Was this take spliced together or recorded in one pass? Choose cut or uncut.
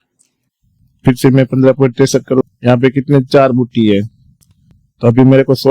cut